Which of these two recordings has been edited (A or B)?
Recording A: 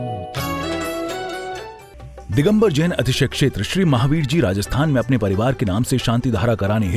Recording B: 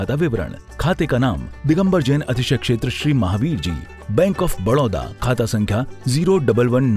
A